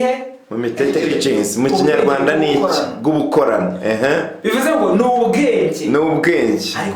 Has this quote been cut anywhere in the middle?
yes; 1 cut; at 1.0 s

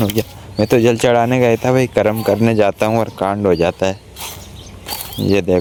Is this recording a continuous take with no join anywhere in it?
yes; 0 cuts

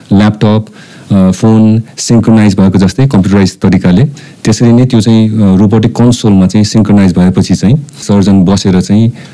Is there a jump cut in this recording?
yes; 1 cut; at 8.0 s

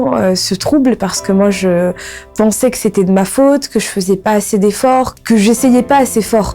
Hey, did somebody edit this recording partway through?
yes; 1 cut; at 5.1 s

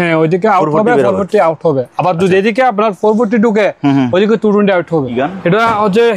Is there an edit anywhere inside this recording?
yes; 1 cut; at 5.1 s

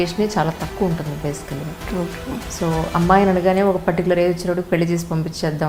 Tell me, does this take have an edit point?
no; 0 cuts

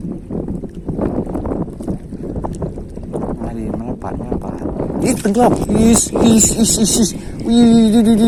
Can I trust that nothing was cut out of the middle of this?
yes; 0 cuts

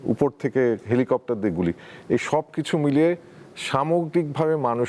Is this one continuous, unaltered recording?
yes; 0 cuts

